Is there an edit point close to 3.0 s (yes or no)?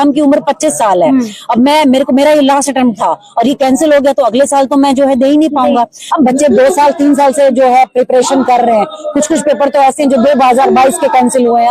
no